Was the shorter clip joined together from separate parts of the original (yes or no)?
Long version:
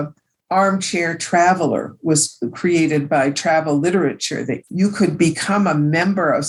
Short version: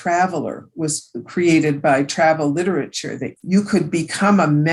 no